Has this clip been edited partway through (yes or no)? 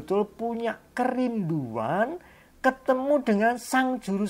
no